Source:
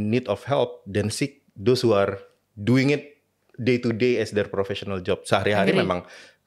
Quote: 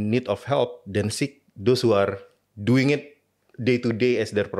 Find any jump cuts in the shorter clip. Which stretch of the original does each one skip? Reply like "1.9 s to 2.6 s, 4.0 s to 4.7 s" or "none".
none